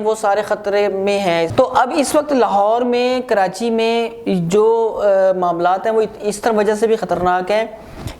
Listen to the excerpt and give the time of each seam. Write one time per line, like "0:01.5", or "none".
0:01.5